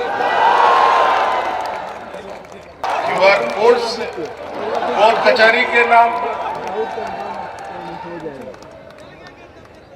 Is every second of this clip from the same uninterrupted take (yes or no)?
no